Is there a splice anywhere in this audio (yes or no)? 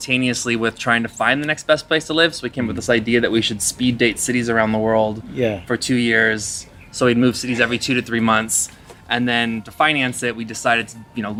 no